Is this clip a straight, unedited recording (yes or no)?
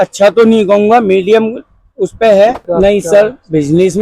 no